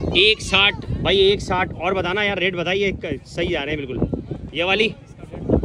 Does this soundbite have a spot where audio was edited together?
no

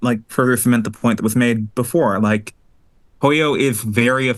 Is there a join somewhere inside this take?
no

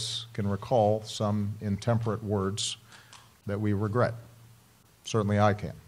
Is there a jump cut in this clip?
no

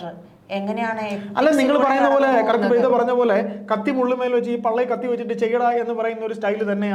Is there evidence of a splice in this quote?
no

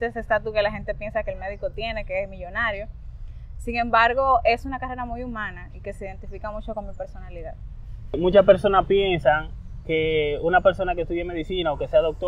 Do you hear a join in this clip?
no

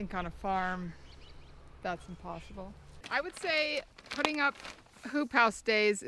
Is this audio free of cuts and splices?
no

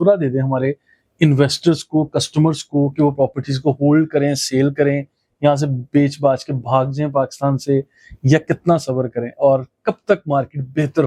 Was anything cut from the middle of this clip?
no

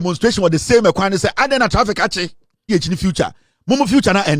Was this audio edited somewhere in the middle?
yes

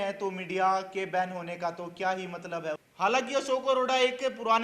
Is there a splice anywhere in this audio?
yes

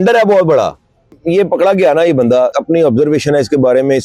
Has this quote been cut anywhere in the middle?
yes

